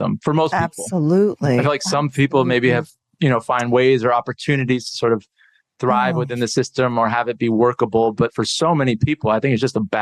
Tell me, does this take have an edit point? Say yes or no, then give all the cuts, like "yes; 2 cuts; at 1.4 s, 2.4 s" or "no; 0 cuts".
no; 0 cuts